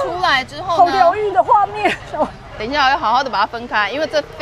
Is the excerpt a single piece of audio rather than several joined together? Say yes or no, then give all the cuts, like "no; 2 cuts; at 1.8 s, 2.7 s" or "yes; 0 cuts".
yes; 0 cuts